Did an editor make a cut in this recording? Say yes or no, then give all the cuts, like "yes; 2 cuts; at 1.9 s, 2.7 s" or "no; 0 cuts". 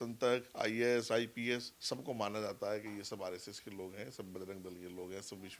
yes; 1 cut; at 1.7 s